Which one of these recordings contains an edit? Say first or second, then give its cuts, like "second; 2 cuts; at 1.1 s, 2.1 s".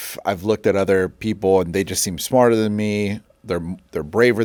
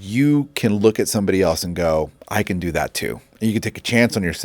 second; 2 cuts; at 2.2 s, 3.3 s